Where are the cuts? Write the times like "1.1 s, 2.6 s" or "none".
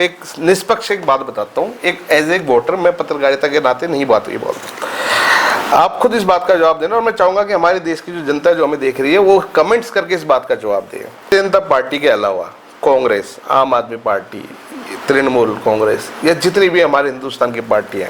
11.2 s